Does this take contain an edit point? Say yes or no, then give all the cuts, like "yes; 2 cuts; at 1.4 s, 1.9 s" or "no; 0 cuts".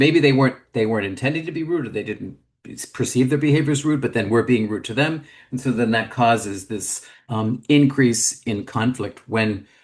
no; 0 cuts